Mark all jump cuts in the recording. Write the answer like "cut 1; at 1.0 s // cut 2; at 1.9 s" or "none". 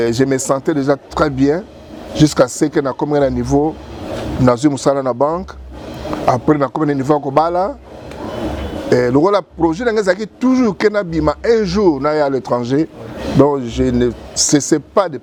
none